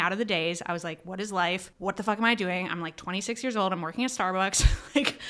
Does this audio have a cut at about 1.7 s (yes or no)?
yes